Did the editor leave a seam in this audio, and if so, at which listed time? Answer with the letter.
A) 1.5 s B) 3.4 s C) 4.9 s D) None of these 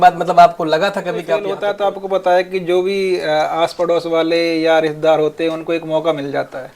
A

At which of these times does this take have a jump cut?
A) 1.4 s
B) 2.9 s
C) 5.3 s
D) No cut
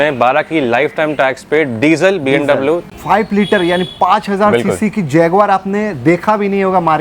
B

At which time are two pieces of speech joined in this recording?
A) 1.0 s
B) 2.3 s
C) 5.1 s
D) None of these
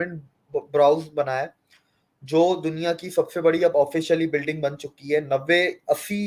D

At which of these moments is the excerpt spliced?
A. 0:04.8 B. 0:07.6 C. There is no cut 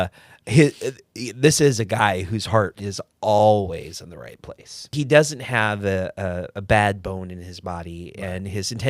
A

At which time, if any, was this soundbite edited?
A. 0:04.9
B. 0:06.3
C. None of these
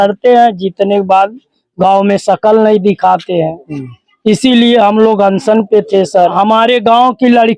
B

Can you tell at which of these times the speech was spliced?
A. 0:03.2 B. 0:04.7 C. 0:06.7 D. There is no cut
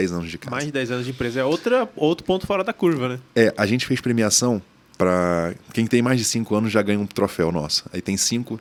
D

